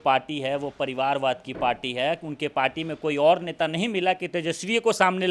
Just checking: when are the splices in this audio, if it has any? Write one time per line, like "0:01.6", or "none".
none